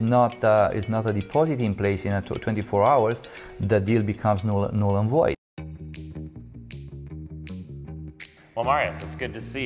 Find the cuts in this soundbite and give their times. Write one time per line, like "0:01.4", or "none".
0:05.5